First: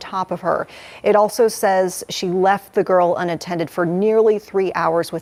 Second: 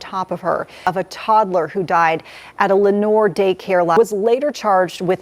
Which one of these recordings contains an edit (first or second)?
second